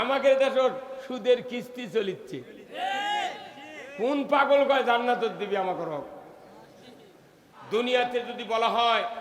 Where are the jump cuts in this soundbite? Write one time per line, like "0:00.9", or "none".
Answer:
0:07.5